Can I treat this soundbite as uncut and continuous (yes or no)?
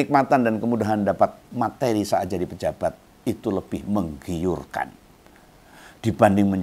yes